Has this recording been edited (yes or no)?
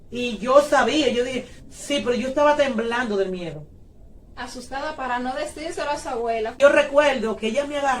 yes